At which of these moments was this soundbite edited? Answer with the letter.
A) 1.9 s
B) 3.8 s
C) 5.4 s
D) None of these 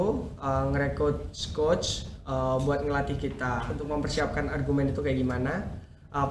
B